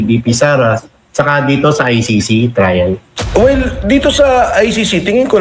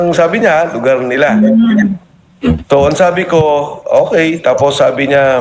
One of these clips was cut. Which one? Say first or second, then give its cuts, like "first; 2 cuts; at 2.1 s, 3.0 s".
first; 1 cut; at 3.1 s